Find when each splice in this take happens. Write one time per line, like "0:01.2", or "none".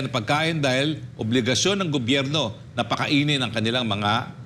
none